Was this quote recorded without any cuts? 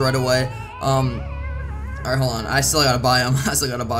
yes; 0 cuts

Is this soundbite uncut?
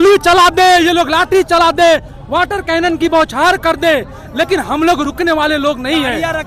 yes; 0 cuts

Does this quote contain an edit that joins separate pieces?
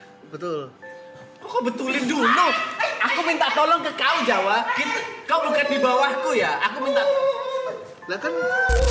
no; 0 cuts

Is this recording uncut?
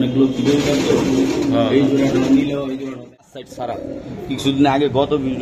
no; 1 cut; at 3.1 s

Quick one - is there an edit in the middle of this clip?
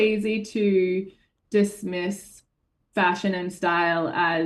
no; 0 cuts

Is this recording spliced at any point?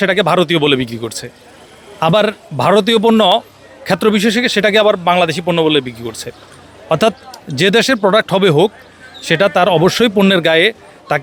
no; 0 cuts

